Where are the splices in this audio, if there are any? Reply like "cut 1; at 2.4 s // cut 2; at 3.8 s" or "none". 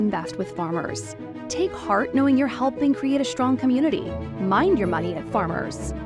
none